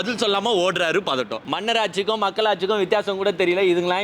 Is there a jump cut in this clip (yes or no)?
yes